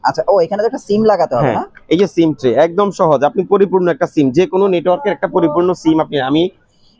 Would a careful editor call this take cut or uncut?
uncut